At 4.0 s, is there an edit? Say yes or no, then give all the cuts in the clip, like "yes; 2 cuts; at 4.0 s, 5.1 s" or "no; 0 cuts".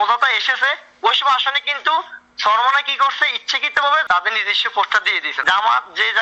yes; 2 cuts; at 4.0 s, 5.2 s